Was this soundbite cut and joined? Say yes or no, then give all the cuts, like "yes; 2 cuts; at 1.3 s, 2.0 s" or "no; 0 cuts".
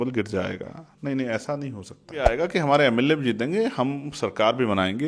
yes; 1 cut; at 2.3 s